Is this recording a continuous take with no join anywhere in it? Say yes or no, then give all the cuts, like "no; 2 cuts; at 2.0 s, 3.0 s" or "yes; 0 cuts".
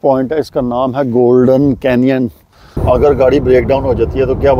no; 1 cut; at 2.8 s